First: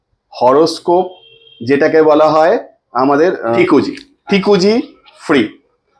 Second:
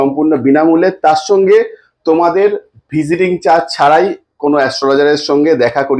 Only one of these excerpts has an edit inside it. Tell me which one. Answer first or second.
first